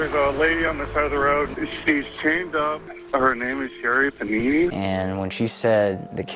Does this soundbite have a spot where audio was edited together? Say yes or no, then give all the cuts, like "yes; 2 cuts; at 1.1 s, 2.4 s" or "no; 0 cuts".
yes; 3 cuts; at 1.5 s, 2.9 s, 4.7 s